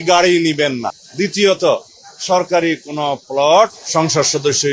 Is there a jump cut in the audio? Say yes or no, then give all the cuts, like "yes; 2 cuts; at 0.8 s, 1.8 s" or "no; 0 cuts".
yes; 2 cuts; at 1.0 s, 3.8 s